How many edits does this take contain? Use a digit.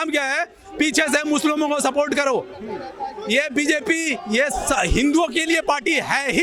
0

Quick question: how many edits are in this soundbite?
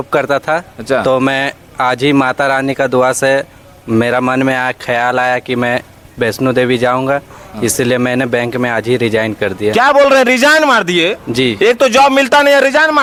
0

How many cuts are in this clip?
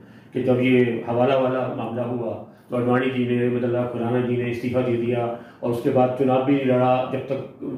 0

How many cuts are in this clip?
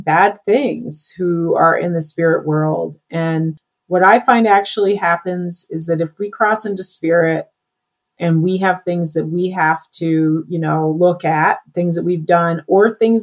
1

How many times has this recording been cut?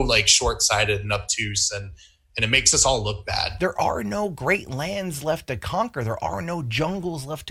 1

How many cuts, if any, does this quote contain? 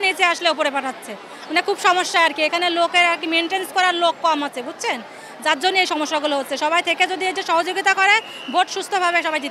0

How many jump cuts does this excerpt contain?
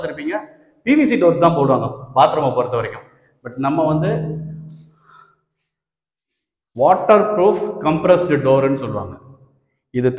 0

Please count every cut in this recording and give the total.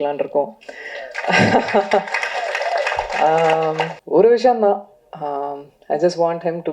1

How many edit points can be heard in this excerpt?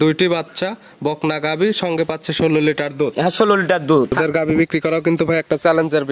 1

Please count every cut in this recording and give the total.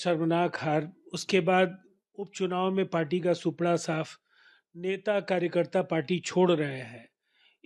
0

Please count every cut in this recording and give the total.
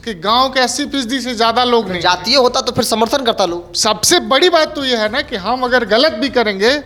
0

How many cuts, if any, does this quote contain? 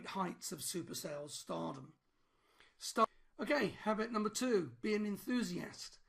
1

